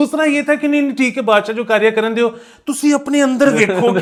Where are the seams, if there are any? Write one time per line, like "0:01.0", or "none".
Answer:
none